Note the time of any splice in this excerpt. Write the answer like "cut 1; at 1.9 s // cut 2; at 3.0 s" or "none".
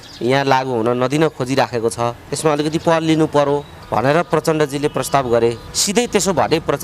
cut 1; at 2.3 s // cut 2; at 3.8 s // cut 3; at 5.7 s